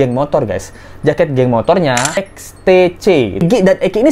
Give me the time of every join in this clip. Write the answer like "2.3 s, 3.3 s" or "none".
2.2 s, 3.4 s